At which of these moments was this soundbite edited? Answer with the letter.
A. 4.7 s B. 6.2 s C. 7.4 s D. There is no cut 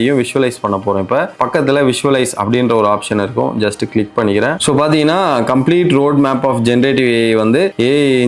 D